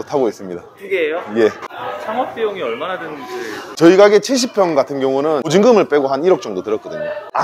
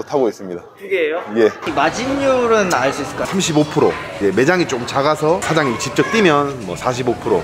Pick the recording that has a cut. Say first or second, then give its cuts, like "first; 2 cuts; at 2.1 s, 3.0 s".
second; 2 cuts; at 1.6 s, 3.3 s